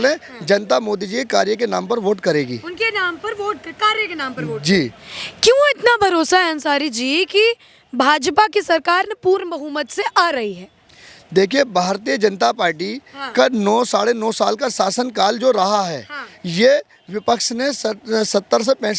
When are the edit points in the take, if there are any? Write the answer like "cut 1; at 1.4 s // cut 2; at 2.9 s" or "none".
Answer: none